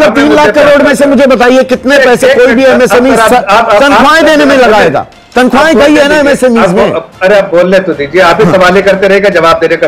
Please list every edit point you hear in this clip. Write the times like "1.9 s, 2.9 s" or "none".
none